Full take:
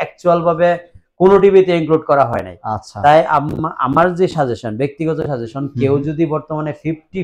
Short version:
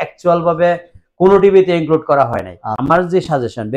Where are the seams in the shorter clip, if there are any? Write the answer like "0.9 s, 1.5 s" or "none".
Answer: 2.7 s